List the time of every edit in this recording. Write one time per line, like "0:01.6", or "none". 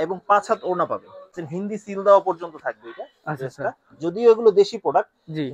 0:01.4

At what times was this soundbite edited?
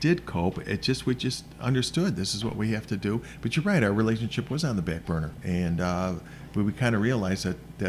0:05.3

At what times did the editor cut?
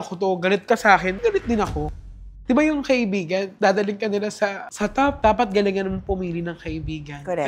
0:01.9
0:05.2

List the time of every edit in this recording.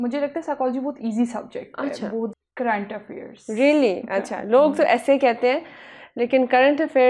0:02.3

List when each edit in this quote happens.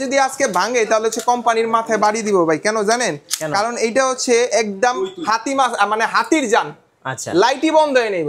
none

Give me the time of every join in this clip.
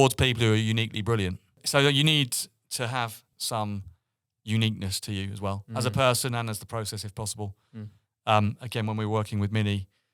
0:01.6
0:03.3

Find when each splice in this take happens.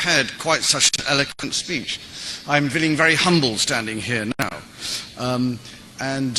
none

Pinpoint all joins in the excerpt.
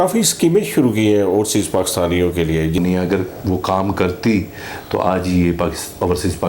0:02.8

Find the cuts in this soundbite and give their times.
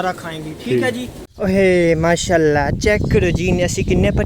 0:01.2

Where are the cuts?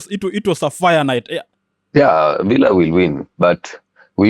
0:01.5

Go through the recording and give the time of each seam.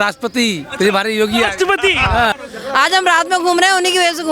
0:02.3

